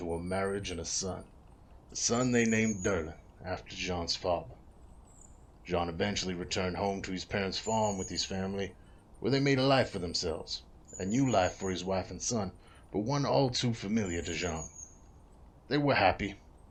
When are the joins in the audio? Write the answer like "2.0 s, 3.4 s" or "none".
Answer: none

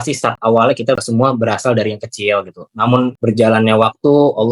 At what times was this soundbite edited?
1.0 s, 3.2 s

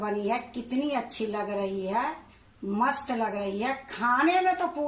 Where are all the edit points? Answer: none

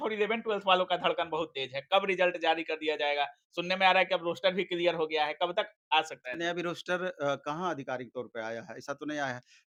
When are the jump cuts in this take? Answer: none

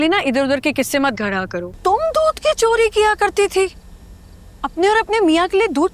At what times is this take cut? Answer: 1.7 s

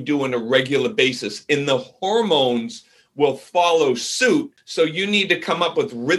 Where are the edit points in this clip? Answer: 4.6 s

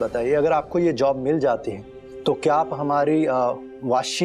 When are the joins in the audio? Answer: none

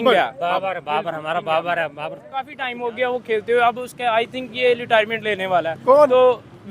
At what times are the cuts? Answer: 2.6 s

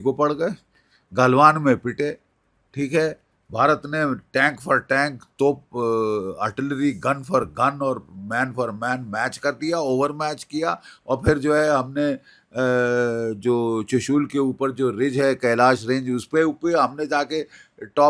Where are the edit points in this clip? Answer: none

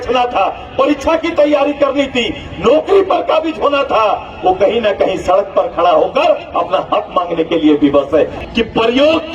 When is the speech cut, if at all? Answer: 8.4 s

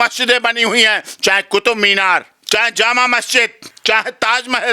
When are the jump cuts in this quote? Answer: 2.3 s, 3.6 s

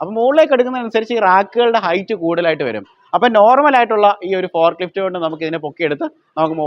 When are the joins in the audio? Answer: none

